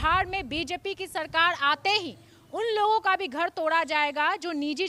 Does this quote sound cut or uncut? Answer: uncut